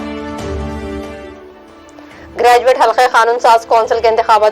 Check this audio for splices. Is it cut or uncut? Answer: cut